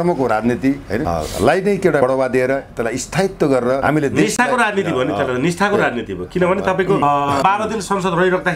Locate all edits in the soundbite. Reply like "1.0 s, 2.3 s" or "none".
1.0 s, 2.0 s, 3.8 s, 7.4 s